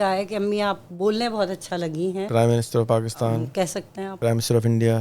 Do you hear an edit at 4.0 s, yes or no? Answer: yes